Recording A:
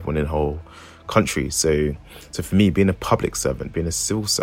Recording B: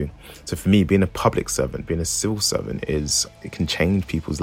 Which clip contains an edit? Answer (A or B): B